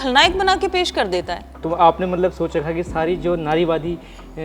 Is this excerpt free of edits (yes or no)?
no